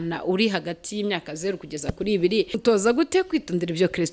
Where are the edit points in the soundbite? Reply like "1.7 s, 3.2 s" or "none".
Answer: 2.5 s